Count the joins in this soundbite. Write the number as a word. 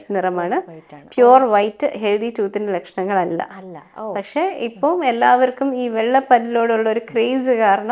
zero